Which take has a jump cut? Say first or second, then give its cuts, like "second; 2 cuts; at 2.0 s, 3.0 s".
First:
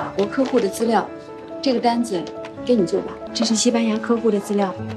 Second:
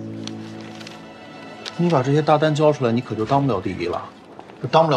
first; 1 cut; at 3.2 s